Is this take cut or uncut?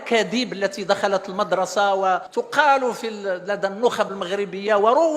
cut